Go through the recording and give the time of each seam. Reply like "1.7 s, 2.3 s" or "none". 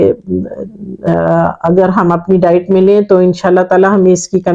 1.1 s